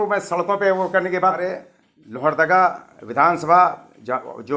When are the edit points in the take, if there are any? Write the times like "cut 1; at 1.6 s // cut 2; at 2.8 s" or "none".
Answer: cut 1; at 1.4 s